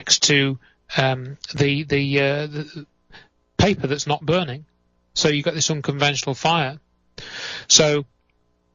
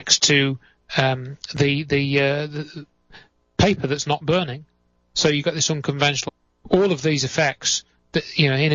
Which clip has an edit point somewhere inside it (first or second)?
first